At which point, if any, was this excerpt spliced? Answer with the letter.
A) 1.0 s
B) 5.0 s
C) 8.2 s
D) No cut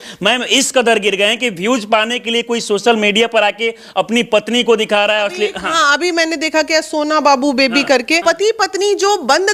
C